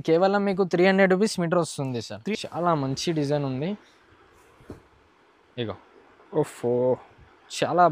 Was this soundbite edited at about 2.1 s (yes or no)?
yes